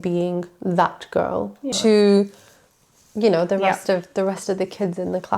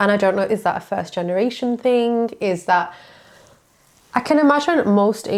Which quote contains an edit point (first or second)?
first